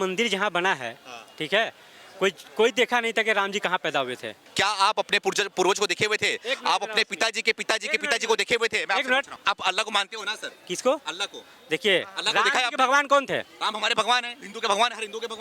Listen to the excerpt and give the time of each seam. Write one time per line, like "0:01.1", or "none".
0:04.3
0:09.3